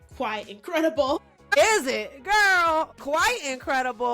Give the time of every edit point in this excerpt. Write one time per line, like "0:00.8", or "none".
0:01.2
0:02.9